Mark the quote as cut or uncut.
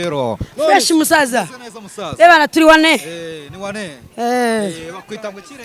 uncut